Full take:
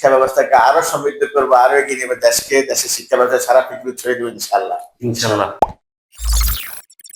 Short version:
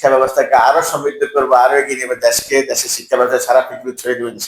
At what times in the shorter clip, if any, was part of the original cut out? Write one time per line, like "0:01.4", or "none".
none